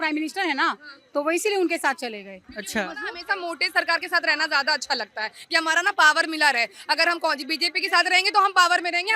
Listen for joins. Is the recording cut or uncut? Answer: uncut